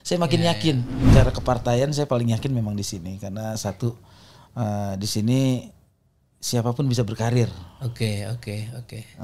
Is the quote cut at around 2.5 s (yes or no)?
no